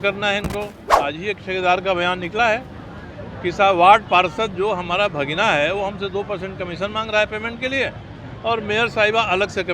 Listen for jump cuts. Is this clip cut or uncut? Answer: cut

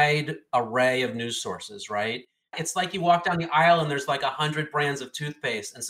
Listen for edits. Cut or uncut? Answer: cut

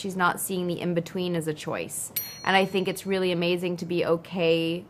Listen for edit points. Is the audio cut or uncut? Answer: uncut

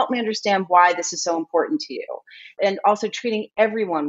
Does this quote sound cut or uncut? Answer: cut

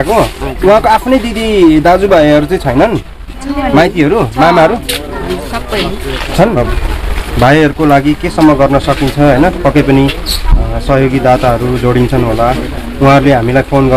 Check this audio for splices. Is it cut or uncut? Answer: cut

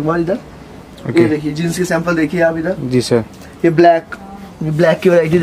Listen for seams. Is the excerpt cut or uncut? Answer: uncut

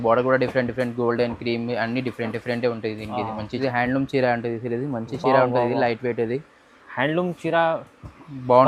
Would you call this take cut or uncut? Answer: cut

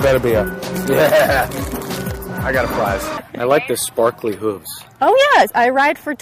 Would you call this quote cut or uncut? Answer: cut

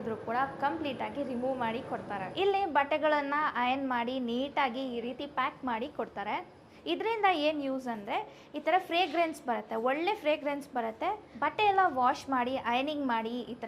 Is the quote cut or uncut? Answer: cut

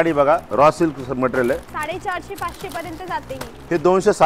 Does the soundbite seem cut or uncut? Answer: uncut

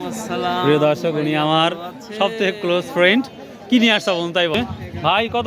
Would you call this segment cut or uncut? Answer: cut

